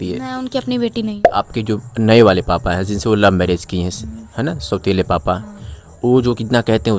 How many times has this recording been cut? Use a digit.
1